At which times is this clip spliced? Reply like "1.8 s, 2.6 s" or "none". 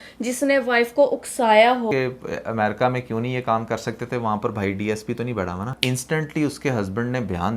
1.9 s, 5.8 s